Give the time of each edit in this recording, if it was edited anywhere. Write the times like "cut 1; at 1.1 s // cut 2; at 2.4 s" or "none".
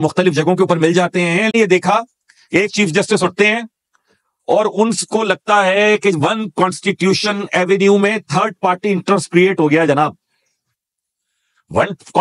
cut 1; at 1.5 s